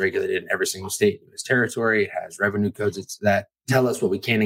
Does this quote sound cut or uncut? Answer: cut